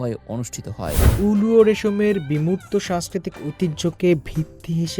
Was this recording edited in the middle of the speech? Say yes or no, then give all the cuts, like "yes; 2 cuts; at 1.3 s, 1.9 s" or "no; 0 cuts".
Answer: yes; 1 cut; at 1.0 s